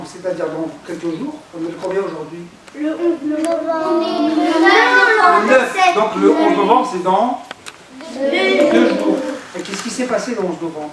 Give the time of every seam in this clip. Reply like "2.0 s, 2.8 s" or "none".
none